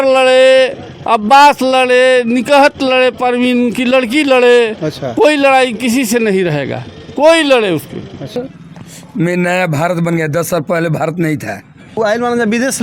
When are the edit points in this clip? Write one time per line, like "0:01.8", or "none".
0:08.4
0:12.0